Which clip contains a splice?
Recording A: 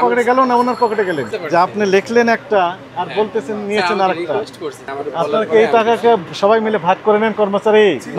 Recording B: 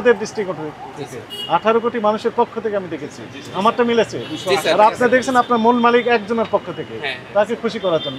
A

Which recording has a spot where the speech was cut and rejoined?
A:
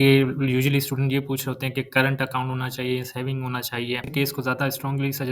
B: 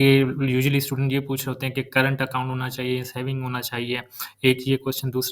A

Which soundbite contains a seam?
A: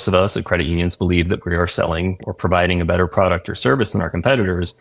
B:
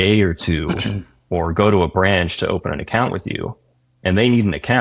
A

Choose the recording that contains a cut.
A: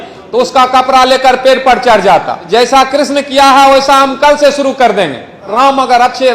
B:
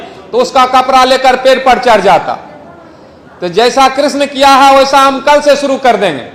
A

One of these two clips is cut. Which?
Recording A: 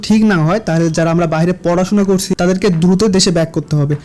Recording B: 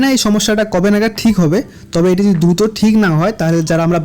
A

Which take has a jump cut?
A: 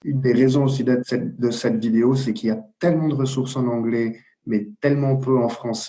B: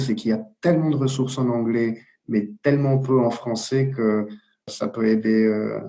B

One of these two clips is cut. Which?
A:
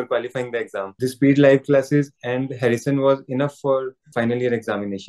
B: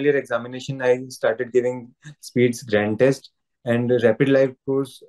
A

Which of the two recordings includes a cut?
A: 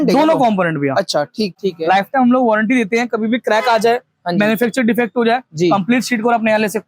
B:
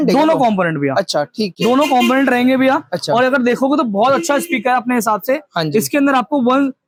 A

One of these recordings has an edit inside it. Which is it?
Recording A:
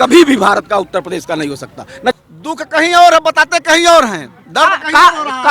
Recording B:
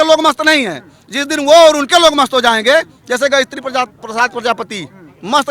A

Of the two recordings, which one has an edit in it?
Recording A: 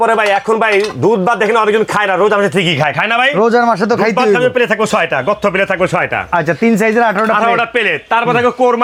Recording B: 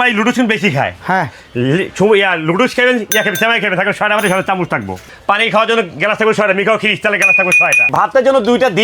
B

